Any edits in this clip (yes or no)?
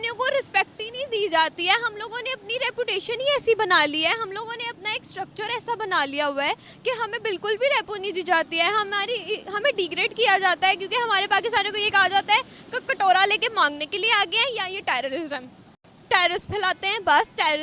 no